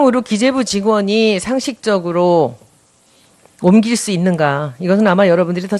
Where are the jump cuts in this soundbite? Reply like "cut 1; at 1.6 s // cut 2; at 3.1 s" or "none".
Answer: cut 1; at 3.0 s